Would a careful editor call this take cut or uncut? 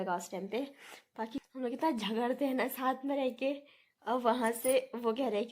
cut